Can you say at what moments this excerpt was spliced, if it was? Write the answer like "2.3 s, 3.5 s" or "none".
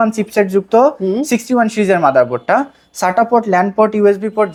none